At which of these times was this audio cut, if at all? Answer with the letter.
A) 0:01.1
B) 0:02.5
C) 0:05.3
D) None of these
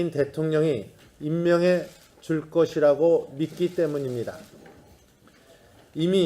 C